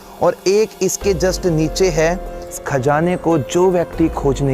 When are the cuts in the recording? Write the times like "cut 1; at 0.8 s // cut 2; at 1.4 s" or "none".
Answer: cut 1; at 2.6 s